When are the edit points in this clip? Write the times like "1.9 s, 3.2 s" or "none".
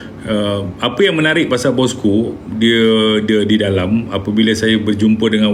none